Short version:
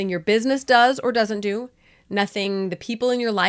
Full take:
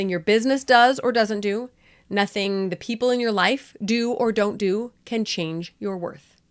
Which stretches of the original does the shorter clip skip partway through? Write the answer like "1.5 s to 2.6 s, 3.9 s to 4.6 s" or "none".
none